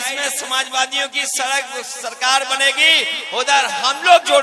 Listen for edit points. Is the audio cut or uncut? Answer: uncut